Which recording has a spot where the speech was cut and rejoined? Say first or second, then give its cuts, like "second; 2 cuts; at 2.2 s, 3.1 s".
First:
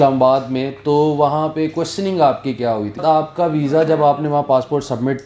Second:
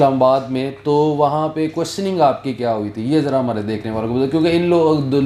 first; 1 cut; at 3.0 s